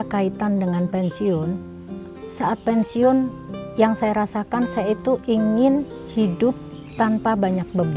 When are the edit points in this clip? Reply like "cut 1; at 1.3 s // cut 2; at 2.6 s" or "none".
none